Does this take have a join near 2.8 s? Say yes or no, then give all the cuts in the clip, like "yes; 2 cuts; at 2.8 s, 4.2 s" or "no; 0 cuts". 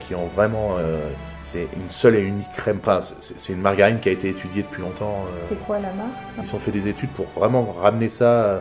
yes; 2 cuts; at 2.8 s, 6.3 s